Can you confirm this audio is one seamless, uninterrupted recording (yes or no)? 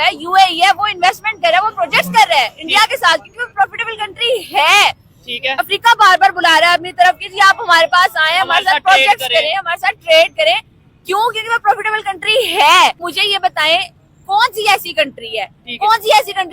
no